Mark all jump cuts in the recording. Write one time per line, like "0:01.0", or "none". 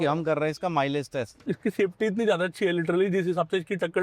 0:01.4